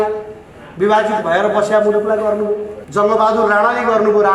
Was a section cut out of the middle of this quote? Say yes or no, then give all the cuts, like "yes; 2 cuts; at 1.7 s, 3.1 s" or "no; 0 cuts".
yes; 1 cut; at 2.8 s